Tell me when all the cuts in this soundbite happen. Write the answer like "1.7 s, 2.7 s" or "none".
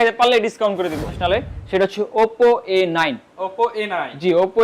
1.1 s